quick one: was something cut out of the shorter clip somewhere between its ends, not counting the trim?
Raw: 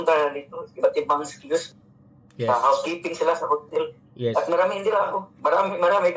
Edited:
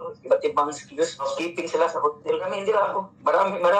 yes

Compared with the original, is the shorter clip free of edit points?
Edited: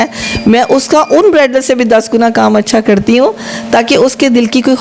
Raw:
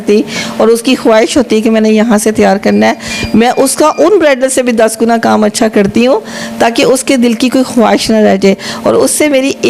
yes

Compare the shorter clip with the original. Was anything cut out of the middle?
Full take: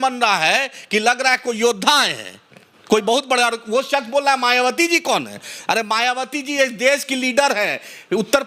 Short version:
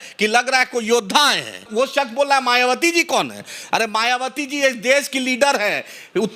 yes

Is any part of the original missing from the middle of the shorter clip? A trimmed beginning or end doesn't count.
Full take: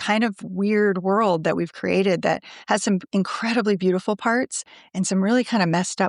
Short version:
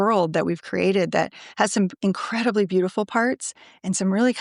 no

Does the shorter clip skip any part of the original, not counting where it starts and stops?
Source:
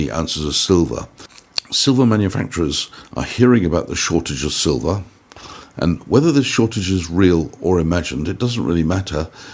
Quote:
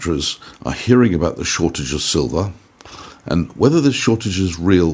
no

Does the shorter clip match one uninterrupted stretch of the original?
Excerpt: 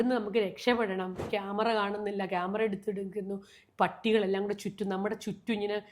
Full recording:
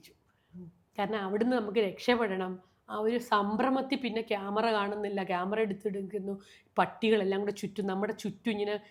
no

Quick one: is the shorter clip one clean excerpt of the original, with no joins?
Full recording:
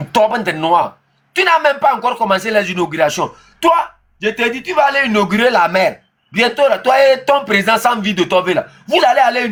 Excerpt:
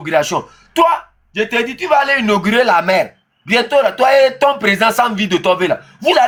yes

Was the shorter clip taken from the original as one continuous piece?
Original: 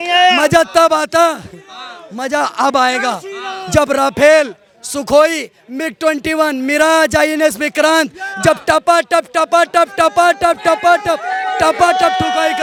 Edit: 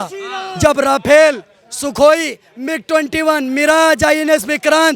yes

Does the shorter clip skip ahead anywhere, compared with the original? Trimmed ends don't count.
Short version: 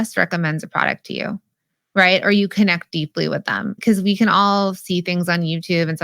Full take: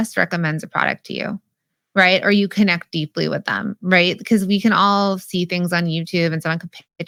yes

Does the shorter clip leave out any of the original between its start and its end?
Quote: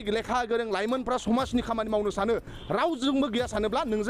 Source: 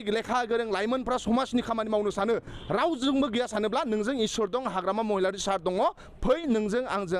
no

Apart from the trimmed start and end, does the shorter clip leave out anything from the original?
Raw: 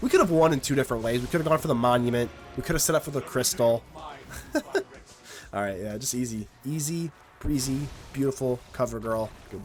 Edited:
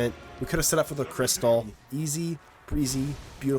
yes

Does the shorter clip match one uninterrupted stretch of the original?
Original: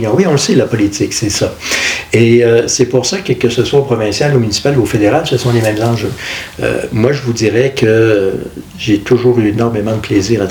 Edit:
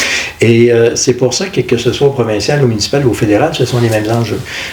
yes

